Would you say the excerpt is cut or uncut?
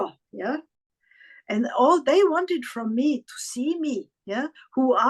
cut